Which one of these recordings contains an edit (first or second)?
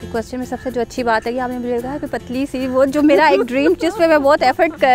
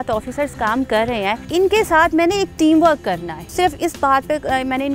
second